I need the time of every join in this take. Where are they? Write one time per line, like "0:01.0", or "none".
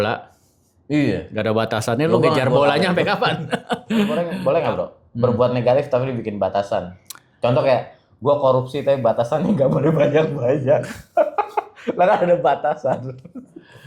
0:04.3